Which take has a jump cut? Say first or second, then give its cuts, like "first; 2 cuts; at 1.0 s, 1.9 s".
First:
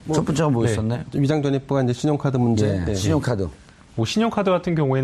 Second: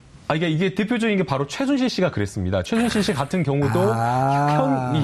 second; 1 cut; at 3.9 s